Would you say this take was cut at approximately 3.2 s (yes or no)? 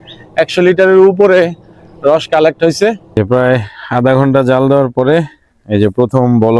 yes